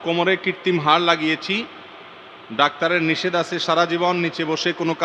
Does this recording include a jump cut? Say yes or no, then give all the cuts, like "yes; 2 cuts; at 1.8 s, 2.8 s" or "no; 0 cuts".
no; 0 cuts